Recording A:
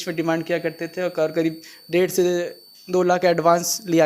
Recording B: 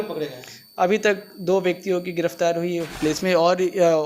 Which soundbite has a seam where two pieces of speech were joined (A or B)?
B